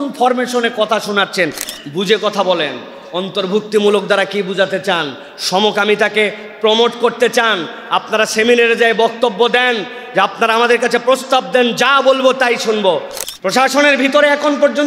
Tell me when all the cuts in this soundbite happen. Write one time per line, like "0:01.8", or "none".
0:01.6
0:13.2